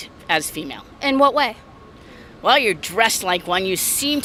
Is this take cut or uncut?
uncut